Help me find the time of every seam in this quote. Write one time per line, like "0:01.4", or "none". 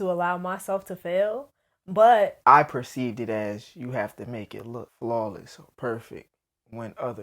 0:02.4
0:04.9